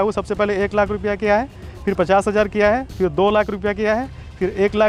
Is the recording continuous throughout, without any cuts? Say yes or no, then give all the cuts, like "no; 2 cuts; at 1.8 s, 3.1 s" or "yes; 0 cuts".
yes; 0 cuts